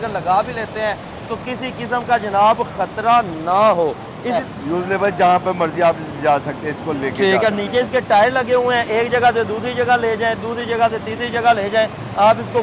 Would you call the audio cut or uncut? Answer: cut